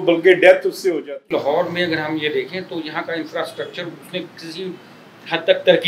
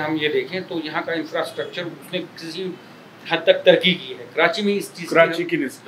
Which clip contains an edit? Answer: first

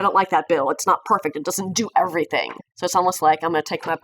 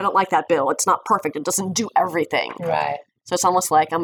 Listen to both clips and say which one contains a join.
first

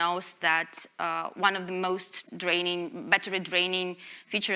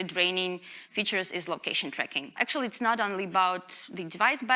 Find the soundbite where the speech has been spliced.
second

